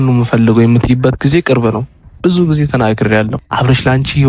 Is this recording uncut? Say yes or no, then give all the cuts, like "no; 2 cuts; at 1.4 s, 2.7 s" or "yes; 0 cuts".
no; 2 cuts; at 2.0 s, 3.4 s